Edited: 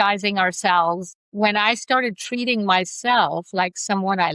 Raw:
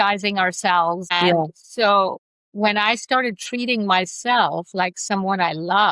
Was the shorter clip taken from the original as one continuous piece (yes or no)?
no